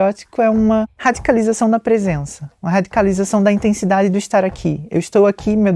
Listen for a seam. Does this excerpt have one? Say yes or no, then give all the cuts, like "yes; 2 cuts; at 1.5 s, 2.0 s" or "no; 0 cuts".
yes; 1 cut; at 0.9 s